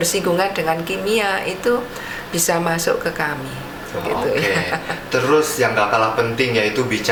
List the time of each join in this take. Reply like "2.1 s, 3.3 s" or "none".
none